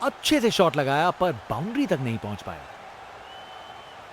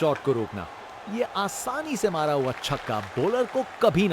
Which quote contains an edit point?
first; 1 cut; at 2.6 s

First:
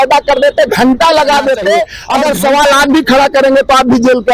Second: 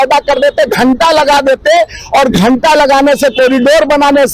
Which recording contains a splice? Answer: first; 1 cut; at 2.0 s

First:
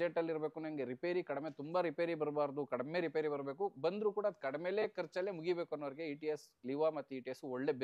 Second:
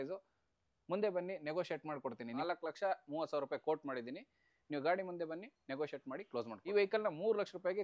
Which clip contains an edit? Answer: second; 2 cuts; at 2.3 s, 6.7 s

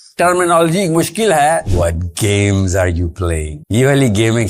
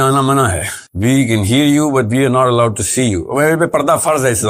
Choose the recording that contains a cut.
first; 1 cut; at 1.7 s

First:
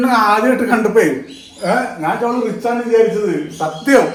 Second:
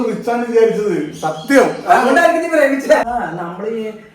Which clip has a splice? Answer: second; 1 cut; at 3.1 s

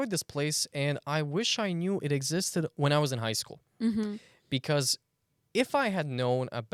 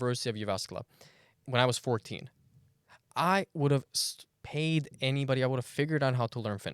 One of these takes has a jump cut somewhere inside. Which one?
second; 1 cut; at 1.4 s

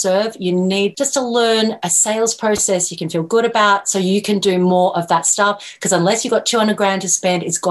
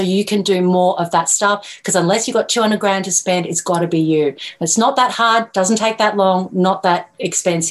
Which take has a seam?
first; 2 cuts; at 0.9 s, 1.8 s

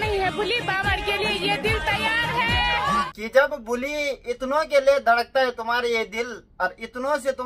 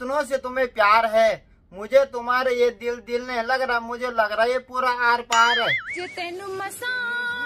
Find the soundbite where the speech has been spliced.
second; 1 cut; at 5.9 s

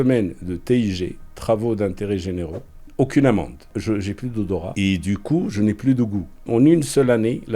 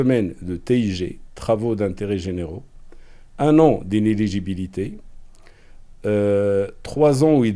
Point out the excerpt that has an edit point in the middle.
first; 3 cuts; at 2.9 s, 3.7 s, 6.5 s

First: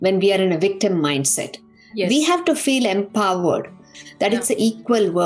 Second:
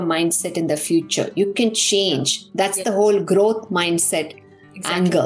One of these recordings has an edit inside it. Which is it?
first; 1 cut; at 4.0 s

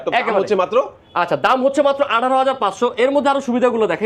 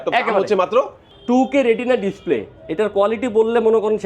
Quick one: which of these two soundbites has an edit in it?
second; 1 cut; at 1.0 s

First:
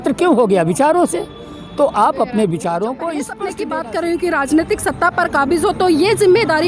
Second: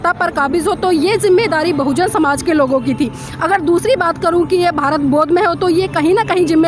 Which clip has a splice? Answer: first; 1 cut; at 3.5 s

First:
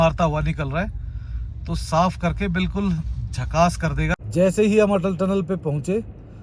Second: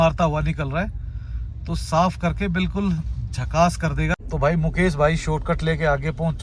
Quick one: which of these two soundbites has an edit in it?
first; 1 cut; at 4.2 s

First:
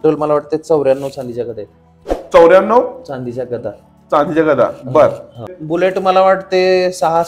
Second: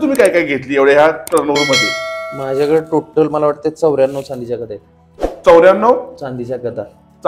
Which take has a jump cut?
first; 1 cut; at 5.6 s

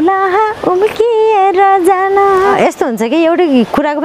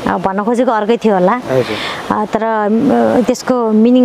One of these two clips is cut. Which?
first; 1 cut; at 2.5 s

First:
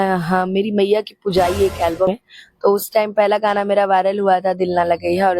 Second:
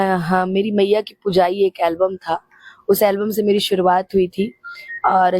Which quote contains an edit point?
first; 1 cut; at 2.1 s

